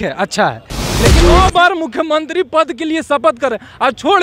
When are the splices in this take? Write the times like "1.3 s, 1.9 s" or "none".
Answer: 1.2 s